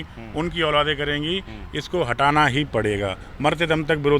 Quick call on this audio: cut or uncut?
uncut